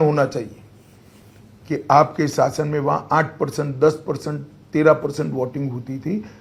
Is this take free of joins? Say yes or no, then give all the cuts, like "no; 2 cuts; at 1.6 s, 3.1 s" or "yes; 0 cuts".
yes; 0 cuts